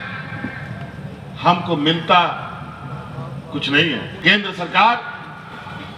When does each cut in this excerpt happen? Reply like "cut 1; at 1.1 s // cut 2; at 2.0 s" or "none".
cut 1; at 4.2 s